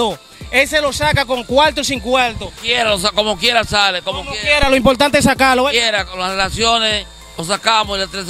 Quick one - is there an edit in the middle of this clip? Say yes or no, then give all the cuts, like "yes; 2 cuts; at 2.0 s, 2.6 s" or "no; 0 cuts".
no; 0 cuts